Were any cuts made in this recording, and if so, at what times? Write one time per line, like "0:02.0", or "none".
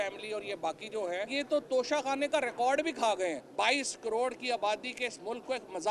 0:01.3
0:03.4